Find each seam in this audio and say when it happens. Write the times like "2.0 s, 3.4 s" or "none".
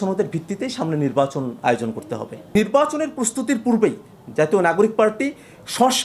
2.5 s